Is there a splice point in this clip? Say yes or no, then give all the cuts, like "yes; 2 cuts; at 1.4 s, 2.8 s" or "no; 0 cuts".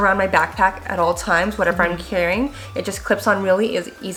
no; 0 cuts